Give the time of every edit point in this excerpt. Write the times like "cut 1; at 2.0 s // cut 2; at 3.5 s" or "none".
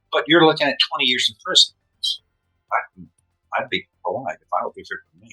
cut 1; at 2.7 s